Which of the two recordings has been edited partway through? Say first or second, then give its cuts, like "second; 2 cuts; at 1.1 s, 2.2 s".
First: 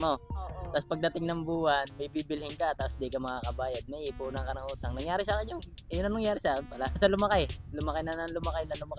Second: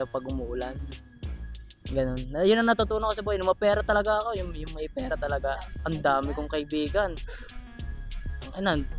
first; 1 cut; at 7.0 s